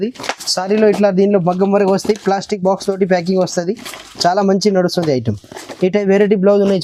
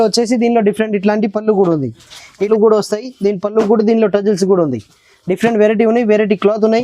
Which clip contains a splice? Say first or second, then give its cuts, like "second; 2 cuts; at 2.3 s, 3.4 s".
second; 1 cut; at 2.4 s